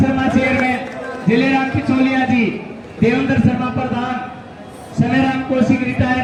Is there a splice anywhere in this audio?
no; 0 cuts

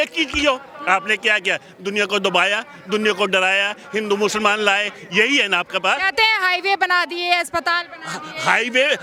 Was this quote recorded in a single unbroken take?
yes; 0 cuts

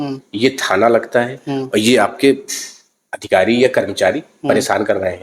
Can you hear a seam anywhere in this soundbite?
no; 0 cuts

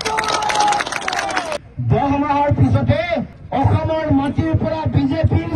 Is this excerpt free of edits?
no; 1 cut; at 1.6 s

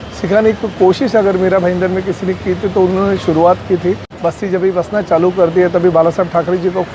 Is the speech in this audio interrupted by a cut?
yes; 1 cut; at 4.1 s

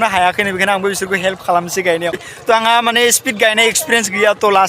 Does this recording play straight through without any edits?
no; 1 cut; at 2.3 s

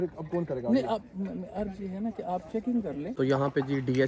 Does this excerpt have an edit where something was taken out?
yes; 1 cut; at 3.1 s

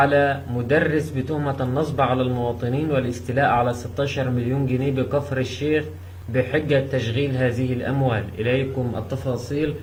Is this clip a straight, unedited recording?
yes; 0 cuts

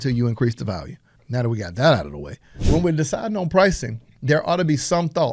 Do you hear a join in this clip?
yes; 2 cuts; at 1.1 s, 2.5 s

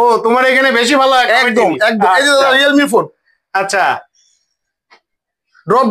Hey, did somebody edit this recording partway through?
no; 0 cuts

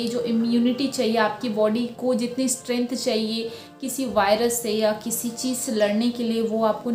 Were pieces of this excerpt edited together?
no; 0 cuts

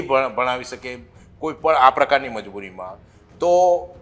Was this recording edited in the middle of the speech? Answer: no; 0 cuts

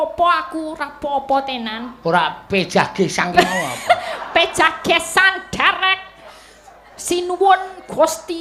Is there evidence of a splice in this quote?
no; 0 cuts

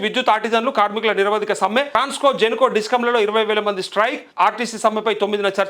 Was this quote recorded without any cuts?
no; 2 cuts; at 1.9 s, 4.2 s

